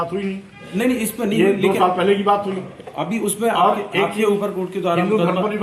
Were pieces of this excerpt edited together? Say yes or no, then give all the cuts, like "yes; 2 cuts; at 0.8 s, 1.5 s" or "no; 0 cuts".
no; 0 cuts